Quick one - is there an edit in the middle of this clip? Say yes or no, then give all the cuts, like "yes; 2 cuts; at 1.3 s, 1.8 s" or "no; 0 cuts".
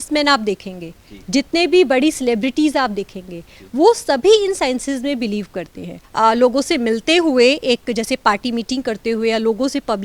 yes; 1 cut; at 6.0 s